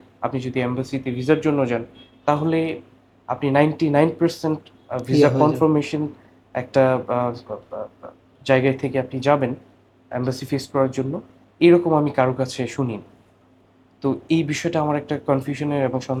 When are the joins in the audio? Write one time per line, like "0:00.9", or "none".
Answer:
none